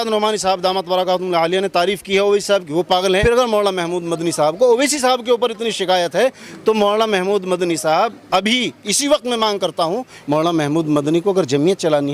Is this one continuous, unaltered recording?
no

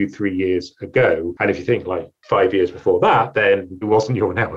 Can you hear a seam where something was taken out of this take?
yes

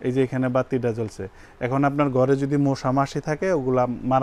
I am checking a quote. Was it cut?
no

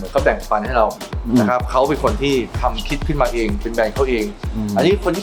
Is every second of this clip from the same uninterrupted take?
yes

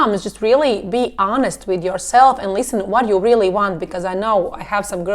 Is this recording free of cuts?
yes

